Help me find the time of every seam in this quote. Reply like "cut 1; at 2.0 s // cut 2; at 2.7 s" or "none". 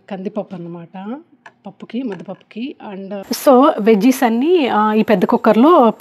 cut 1; at 3.2 s